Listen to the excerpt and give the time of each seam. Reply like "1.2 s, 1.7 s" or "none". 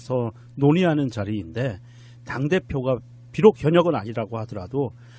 none